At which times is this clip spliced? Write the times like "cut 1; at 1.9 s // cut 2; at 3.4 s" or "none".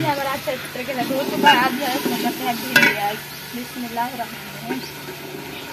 none